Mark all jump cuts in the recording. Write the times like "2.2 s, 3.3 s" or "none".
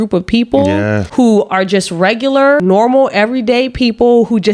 1.0 s, 2.6 s